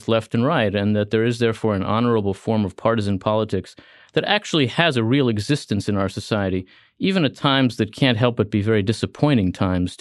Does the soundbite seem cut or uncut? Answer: uncut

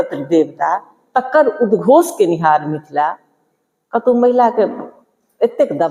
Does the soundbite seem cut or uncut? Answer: uncut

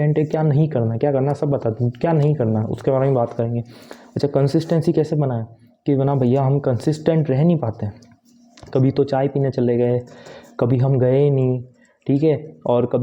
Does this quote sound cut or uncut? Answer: uncut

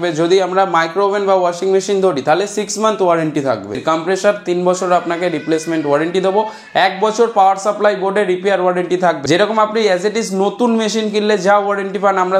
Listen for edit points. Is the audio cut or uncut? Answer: cut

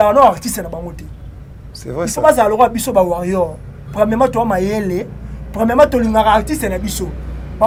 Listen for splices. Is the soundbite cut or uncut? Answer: uncut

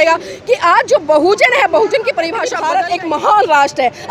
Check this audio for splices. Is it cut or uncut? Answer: cut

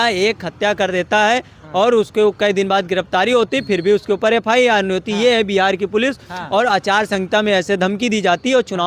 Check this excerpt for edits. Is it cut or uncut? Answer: uncut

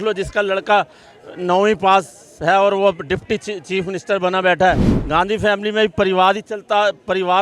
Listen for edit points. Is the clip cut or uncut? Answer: cut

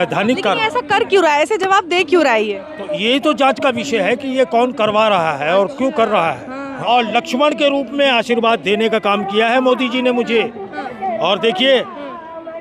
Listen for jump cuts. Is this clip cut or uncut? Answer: cut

